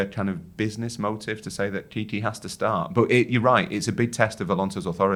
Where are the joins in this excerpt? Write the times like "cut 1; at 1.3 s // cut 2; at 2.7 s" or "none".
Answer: none